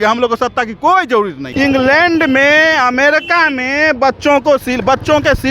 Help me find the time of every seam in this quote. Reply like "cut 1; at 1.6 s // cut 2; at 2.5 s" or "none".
cut 1; at 1.4 s